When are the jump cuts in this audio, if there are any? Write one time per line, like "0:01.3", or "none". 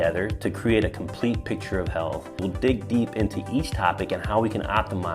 0:02.4